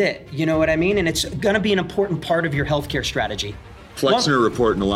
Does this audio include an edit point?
yes; 1 cut; at 3.8 s

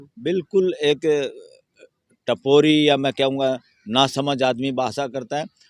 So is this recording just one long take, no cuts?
yes; 0 cuts

